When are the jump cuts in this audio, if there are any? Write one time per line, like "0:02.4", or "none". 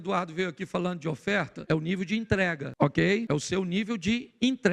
0:01.6
0:02.7
0:03.2